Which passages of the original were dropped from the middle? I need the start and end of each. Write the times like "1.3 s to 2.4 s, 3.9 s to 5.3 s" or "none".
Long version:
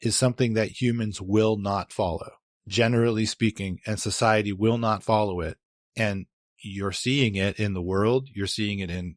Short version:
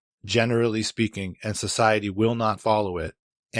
none